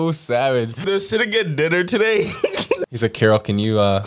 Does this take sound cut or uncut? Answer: cut